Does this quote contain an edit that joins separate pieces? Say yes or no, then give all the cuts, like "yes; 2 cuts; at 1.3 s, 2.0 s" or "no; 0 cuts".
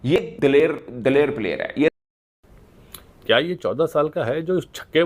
yes; 1 cut; at 1.9 s